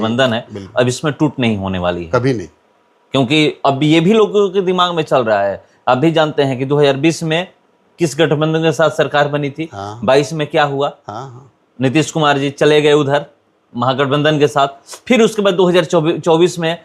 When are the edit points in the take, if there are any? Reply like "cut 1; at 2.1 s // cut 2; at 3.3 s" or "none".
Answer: none